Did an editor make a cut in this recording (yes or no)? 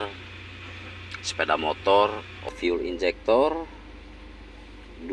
yes